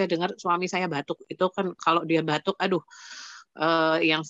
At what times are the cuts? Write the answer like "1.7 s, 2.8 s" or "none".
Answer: none